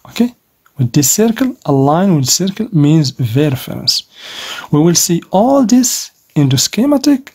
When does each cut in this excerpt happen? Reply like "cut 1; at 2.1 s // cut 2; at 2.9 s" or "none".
none